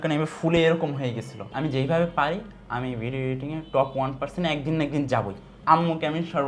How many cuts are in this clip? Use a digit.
2